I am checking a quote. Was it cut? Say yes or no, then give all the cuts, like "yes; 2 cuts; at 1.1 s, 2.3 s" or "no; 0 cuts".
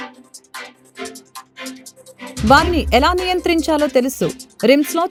no; 0 cuts